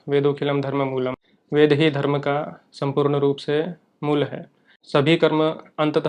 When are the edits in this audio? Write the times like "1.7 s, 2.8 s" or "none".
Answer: 1.2 s, 4.8 s